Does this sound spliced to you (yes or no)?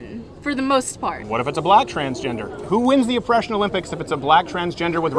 yes